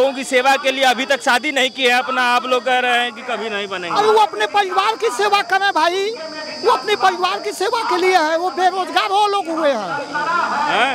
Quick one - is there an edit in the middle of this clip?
no; 0 cuts

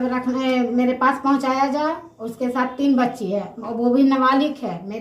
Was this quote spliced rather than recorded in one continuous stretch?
no; 0 cuts

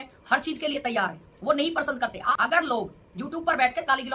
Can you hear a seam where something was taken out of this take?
yes; 1 cut; at 2.2 s

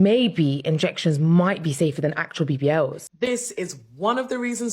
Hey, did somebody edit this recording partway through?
yes; 1 cut; at 3.0 s

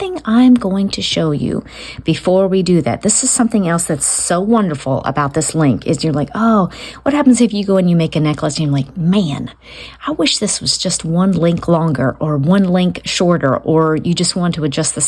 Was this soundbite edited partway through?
no; 0 cuts

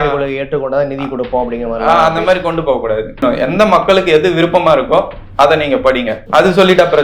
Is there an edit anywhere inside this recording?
yes; 2 cuts; at 3.2 s, 6.2 s

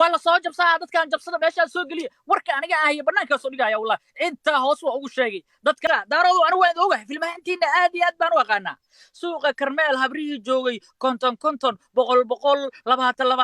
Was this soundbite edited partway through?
yes; 1 cut; at 5.8 s

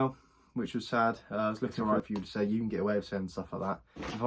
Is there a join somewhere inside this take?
yes; 1 cut; at 1.8 s

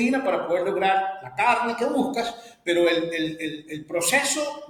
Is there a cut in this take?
no; 0 cuts

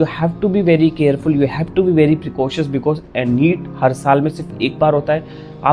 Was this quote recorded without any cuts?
yes; 0 cuts

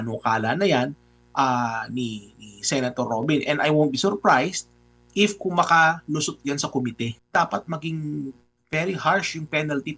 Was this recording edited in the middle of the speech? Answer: yes; 1 cut; at 7.2 s

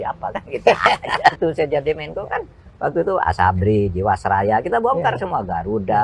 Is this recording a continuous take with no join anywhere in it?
no; 1 cut; at 1.4 s

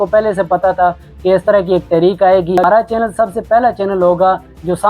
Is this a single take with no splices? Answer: no; 1 cut; at 2.6 s

